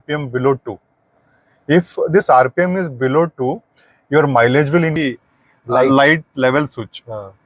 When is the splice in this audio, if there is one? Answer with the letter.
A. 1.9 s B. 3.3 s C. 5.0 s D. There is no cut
C